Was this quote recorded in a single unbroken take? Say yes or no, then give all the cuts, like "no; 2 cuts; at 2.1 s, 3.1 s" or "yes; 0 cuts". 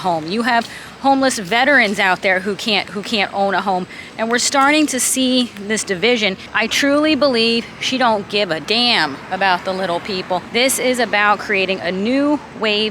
no; 3 cuts; at 6.4 s, 8.6 s, 10.5 s